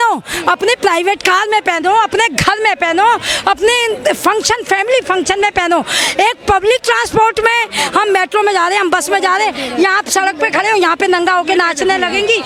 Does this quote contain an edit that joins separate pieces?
no; 0 cuts

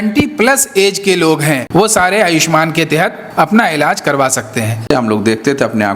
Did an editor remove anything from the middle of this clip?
yes; 3 cuts; at 1.6 s, 3.2 s, 4.9 s

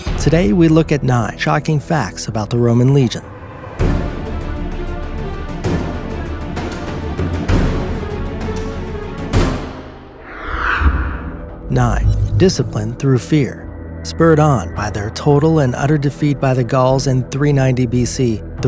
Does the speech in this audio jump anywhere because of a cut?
yes; 1 cut; at 9.9 s

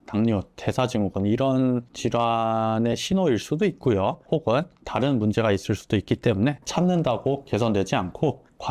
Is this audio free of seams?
yes; 0 cuts

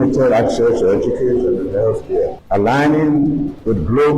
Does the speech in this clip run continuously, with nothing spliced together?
no; 1 cut; at 2.4 s

